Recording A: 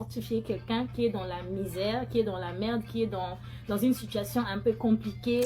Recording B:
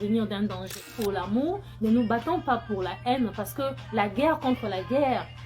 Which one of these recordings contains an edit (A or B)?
B